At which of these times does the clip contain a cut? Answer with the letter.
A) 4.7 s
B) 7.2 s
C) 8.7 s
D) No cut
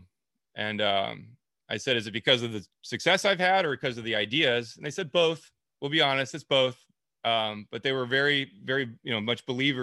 D